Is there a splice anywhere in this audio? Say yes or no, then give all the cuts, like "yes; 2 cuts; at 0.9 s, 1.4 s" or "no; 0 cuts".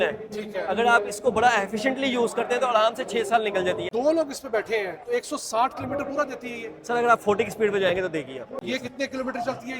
yes; 2 cuts; at 3.9 s, 8.6 s